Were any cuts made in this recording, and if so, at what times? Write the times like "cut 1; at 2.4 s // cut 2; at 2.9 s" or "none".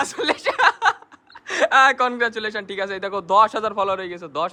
none